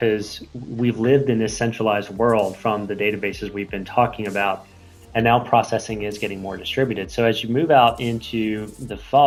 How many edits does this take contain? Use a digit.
0